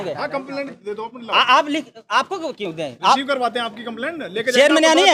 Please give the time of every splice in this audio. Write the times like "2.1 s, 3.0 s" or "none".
none